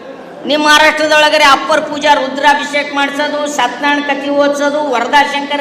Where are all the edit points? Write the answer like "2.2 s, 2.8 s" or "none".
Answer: none